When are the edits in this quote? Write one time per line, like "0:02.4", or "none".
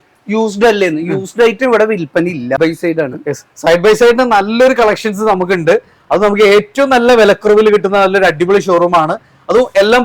0:02.6